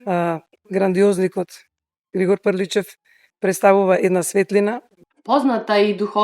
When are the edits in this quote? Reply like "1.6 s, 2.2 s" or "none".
4.9 s